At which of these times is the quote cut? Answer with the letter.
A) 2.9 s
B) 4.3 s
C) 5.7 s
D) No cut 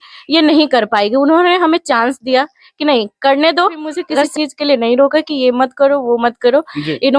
B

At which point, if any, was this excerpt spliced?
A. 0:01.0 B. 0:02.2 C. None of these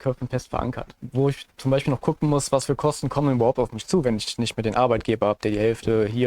A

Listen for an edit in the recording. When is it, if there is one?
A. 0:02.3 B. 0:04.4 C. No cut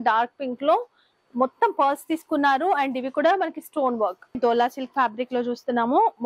B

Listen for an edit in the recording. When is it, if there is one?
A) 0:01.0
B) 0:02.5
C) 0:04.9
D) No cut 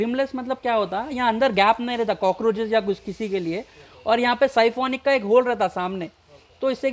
D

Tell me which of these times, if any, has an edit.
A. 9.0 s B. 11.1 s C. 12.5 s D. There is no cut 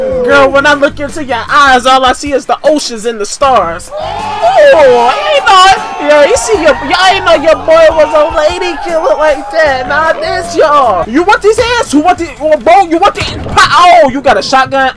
B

